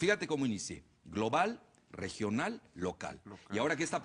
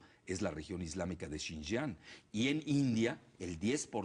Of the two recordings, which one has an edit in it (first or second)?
first